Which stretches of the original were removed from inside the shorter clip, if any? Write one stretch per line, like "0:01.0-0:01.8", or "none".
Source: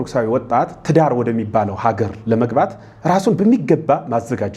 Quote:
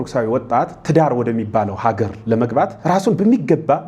0:02.8-0:03.0

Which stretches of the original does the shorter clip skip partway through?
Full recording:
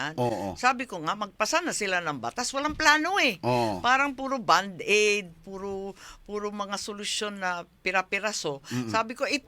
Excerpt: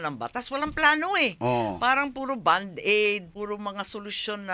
0:05.3-0:06.2

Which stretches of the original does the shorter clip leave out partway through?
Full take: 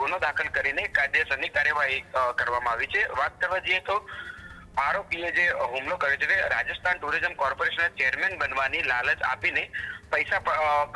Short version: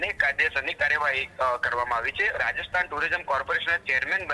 0:03.1-0:06.5

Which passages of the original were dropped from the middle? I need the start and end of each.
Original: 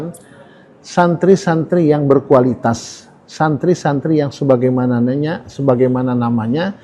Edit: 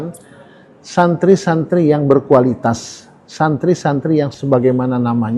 0:04.4-0:05.5

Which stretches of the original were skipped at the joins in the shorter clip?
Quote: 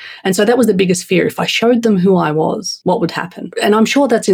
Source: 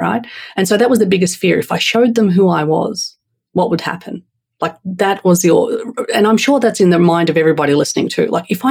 0:03.0-0:03.4
0:04.1-0:06.0

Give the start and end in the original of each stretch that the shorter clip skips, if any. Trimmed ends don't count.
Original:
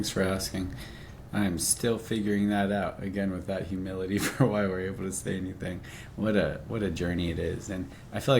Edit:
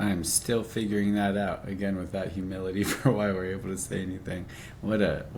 none

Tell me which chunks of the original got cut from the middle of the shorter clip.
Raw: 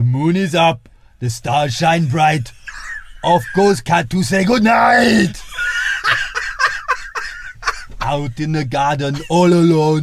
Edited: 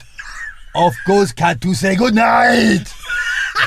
none

